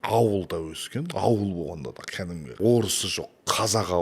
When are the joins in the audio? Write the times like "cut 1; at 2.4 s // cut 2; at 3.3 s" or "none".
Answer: cut 1; at 2.6 s